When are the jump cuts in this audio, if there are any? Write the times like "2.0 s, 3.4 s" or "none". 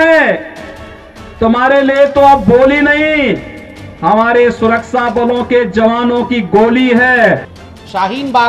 7.5 s